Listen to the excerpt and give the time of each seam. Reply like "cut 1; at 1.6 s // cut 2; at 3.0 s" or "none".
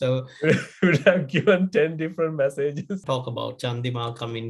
cut 1; at 3.0 s